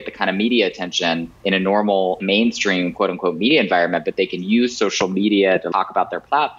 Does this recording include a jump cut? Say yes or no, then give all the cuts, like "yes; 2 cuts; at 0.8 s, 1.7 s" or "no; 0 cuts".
yes; 3 cuts; at 1.3 s, 2.2 s, 5.7 s